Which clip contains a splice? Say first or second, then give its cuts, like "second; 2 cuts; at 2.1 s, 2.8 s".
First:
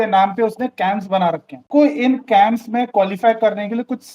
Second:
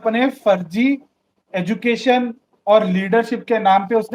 first; 1 cut; at 1.6 s